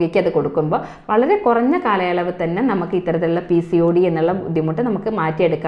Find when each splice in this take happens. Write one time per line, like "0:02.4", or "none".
none